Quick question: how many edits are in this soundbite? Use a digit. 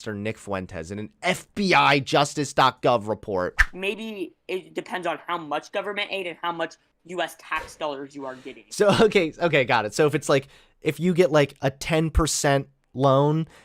1